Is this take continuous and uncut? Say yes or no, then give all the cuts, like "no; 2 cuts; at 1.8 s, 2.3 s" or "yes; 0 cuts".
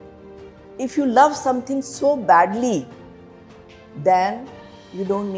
yes; 0 cuts